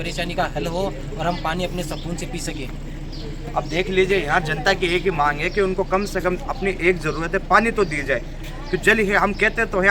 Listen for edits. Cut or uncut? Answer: uncut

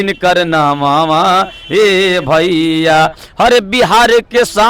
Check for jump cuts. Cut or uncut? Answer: uncut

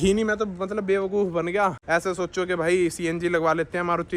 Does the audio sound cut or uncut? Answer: cut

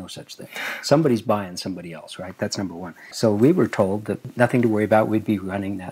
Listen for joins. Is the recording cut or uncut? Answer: cut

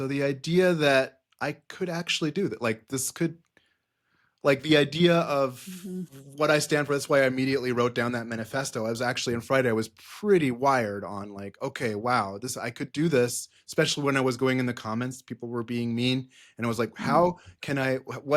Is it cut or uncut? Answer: uncut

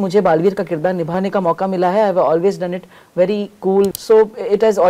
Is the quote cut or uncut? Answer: cut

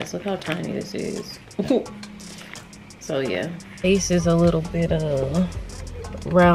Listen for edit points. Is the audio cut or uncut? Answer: cut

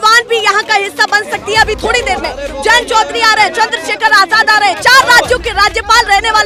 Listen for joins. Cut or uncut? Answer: uncut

